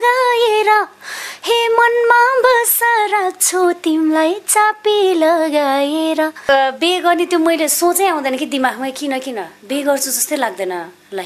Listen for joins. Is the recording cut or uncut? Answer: cut